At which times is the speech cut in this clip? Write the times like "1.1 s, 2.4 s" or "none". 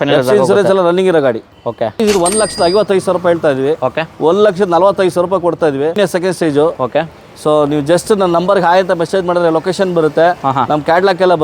2.0 s, 6.0 s